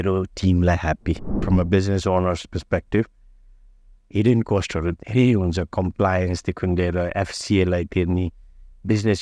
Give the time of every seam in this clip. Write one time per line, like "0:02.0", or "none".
0:01.4